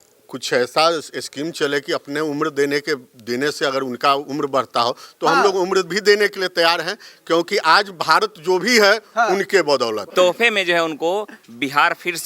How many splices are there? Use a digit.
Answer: 1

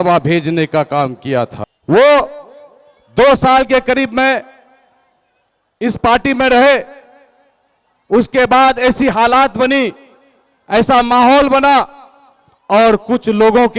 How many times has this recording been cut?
1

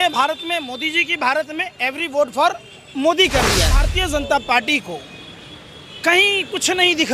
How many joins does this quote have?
1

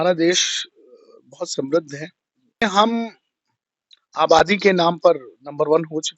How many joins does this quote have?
1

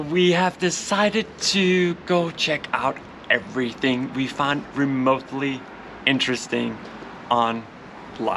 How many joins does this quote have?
0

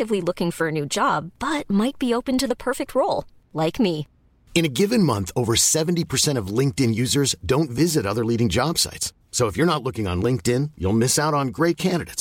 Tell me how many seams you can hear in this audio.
0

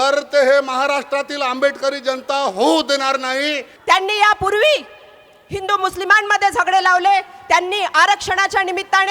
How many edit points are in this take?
1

